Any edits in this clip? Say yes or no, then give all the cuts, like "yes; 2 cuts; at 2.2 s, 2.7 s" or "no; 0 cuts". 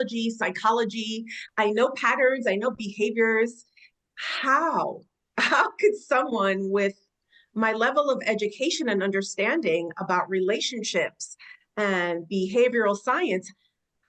no; 0 cuts